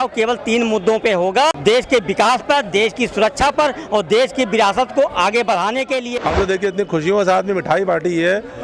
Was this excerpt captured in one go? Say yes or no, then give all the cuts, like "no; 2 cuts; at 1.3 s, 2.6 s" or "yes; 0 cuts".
no; 2 cuts; at 1.6 s, 6.1 s